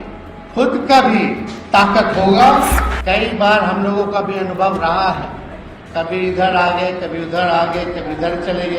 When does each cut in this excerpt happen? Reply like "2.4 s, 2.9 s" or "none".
2.9 s

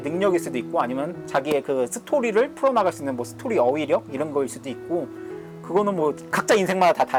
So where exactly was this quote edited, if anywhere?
none

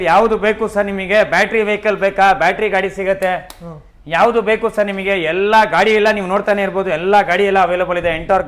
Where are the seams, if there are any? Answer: none

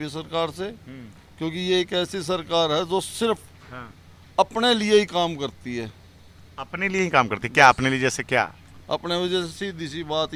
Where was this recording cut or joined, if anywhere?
none

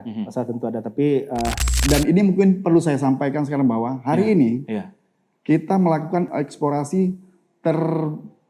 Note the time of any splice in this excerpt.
1.7 s, 6.3 s

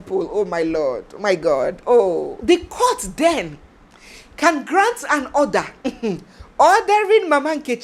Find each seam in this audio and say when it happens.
2.3 s

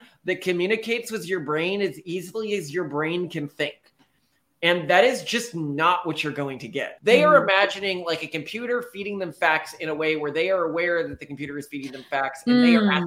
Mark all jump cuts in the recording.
6.9 s

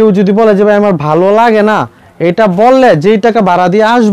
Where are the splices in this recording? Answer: none

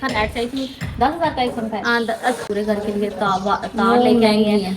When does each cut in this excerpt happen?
2.4 s

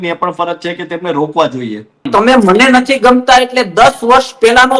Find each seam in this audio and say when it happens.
2.1 s

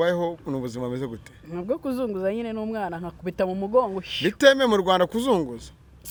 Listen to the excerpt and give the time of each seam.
none

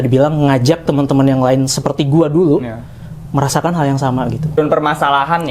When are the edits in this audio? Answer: 4.6 s

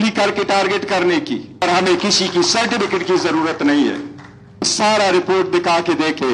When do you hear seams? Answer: 1.6 s, 4.7 s

